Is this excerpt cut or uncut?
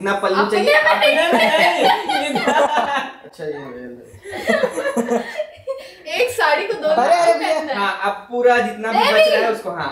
uncut